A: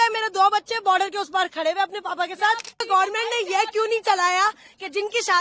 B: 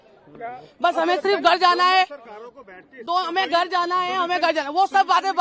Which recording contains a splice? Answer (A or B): A